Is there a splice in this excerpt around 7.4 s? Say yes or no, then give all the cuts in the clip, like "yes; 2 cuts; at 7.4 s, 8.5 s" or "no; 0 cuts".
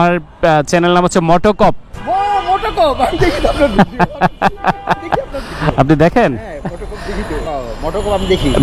yes; 1 cut; at 7.4 s